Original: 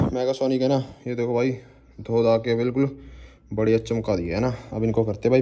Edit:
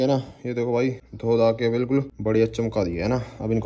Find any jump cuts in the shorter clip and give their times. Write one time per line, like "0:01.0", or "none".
0:01.1
0:02.1

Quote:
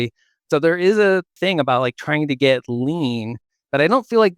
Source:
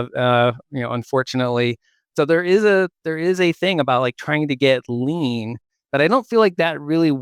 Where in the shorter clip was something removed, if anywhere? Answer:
0:01.4

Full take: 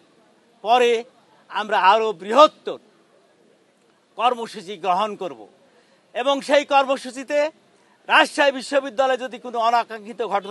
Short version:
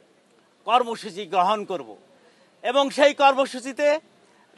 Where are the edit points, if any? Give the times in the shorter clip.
none

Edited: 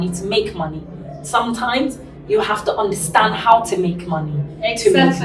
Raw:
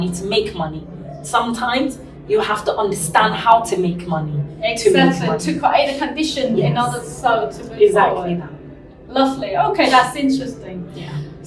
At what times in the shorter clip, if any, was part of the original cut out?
none

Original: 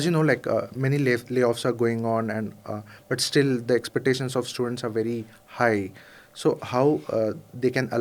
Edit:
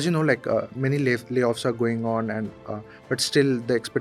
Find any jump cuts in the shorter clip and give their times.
none

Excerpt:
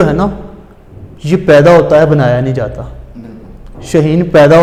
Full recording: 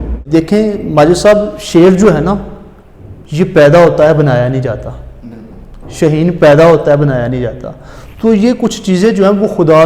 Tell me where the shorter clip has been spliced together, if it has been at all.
none

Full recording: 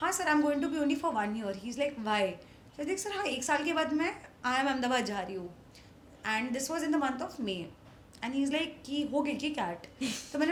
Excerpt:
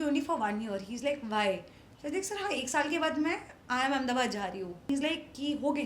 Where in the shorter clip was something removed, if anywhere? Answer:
0:04.9

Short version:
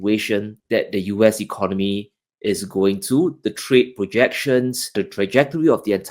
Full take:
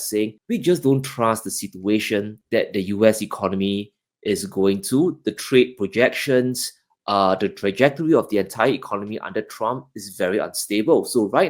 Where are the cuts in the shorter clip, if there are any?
0:04.9

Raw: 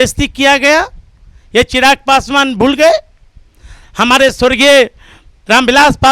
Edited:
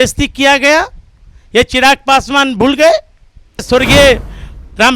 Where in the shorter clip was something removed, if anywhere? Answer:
0:03.6

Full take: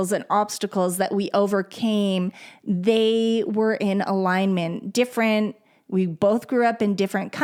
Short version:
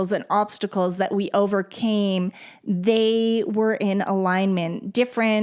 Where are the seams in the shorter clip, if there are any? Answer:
none

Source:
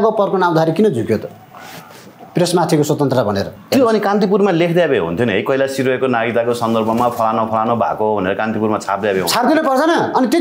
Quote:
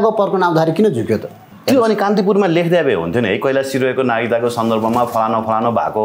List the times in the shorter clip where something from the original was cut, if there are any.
0:01.5

